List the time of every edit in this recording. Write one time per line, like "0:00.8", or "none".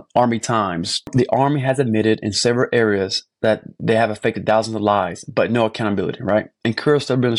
0:01.1